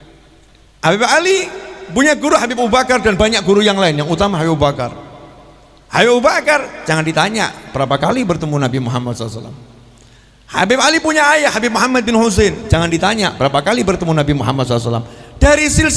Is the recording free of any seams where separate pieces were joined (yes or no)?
yes